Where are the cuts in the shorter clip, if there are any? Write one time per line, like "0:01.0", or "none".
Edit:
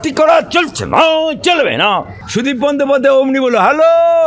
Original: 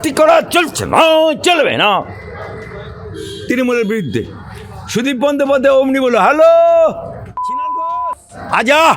0:02.2